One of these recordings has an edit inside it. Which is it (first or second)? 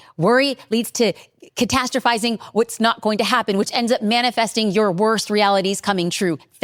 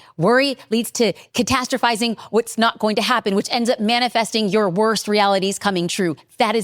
second